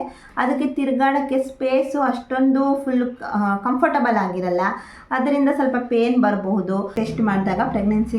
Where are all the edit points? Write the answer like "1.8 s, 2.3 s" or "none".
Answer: 6.9 s